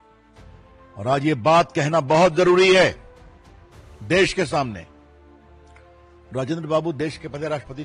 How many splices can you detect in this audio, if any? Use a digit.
0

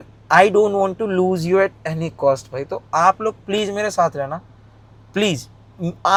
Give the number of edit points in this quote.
0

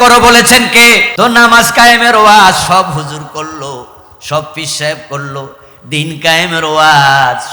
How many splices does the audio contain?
1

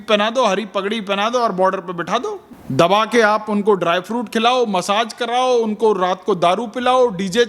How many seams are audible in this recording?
1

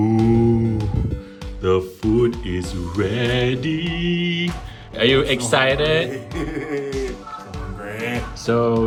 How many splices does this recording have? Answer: 0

